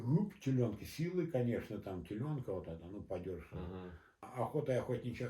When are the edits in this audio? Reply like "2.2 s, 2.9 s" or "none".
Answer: 4.2 s